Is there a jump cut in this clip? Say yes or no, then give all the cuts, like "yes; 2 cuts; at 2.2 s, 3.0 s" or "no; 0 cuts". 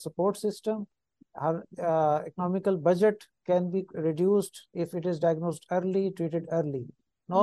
no; 0 cuts